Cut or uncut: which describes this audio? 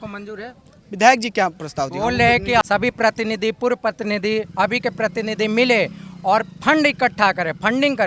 cut